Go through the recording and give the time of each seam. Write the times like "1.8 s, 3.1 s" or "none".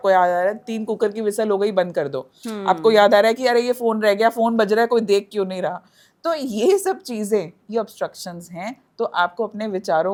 none